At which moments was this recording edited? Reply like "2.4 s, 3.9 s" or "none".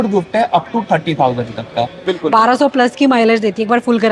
2.1 s